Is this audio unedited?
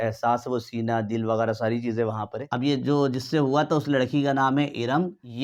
yes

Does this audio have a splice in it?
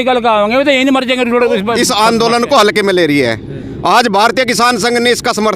yes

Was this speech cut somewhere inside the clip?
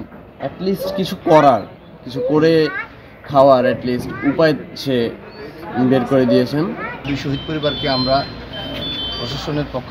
yes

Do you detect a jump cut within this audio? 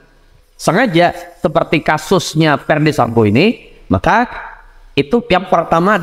no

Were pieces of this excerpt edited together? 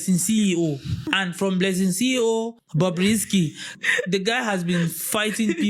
yes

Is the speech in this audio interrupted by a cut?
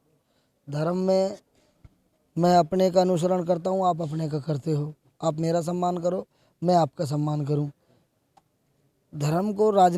no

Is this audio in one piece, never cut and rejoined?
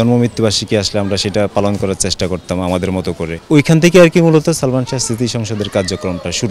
no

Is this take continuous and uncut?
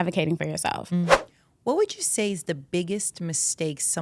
no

